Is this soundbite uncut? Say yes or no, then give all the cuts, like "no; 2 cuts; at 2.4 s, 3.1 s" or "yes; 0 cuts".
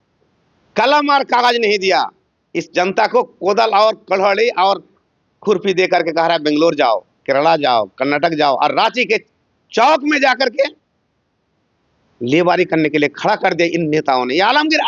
yes; 0 cuts